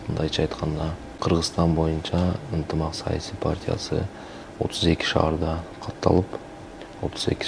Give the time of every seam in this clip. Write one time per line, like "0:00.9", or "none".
0:01.1